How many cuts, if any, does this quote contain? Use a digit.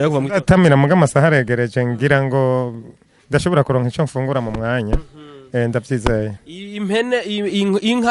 1